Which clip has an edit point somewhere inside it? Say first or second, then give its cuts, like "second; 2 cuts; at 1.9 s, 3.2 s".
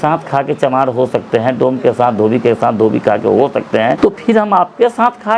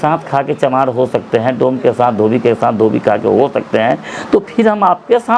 first; 1 cut; at 4.0 s